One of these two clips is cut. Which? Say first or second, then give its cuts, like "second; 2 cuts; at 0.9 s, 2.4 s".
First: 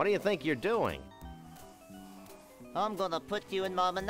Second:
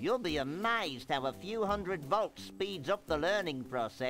first; 2 cuts; at 1.0 s, 2.4 s